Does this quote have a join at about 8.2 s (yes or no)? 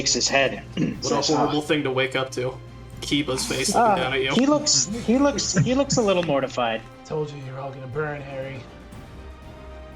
no